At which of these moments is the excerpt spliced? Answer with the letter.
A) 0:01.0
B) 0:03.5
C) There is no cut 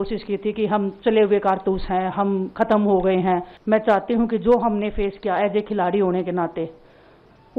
B